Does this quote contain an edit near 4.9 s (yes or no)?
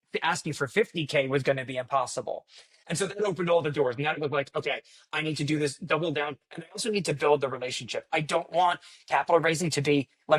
no